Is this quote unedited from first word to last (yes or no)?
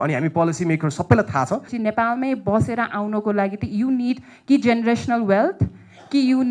no